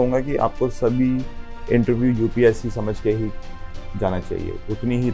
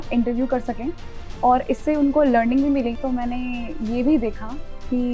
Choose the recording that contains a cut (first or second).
second